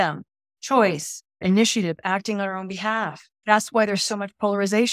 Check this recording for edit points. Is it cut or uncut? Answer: cut